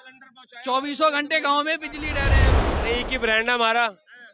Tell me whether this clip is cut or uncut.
cut